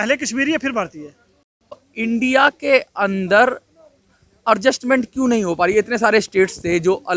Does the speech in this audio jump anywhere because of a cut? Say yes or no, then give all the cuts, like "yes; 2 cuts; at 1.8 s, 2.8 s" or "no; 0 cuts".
yes; 1 cut; at 1.9 s